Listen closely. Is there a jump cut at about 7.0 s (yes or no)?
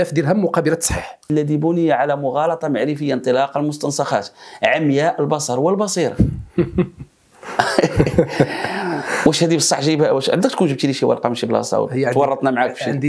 no